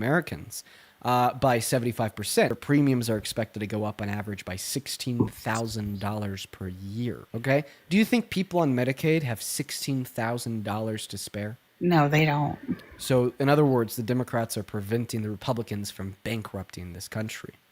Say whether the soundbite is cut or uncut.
cut